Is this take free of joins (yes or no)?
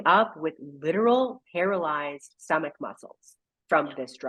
yes